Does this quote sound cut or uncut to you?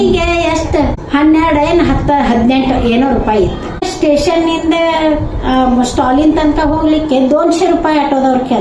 cut